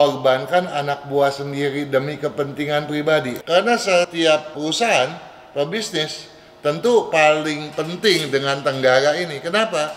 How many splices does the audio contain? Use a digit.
2